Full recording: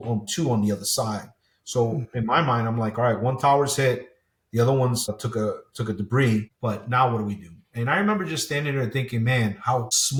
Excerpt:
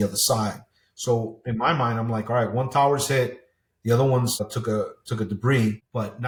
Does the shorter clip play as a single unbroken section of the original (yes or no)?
yes